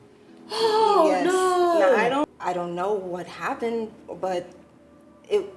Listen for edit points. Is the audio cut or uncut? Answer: cut